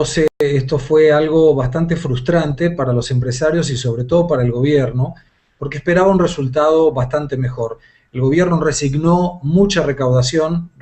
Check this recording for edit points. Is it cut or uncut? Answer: uncut